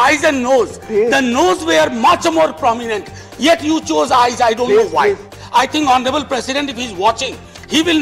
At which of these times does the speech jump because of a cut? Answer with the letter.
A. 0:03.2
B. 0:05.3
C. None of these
B